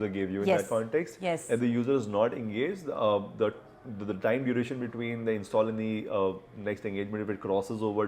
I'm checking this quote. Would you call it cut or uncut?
uncut